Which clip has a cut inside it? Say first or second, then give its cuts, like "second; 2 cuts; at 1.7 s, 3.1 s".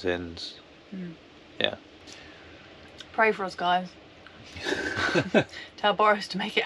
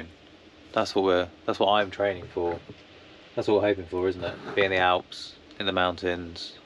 first; 1 cut; at 1.9 s